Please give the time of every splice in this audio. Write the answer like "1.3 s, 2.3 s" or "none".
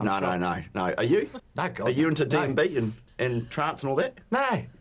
1.4 s, 3.0 s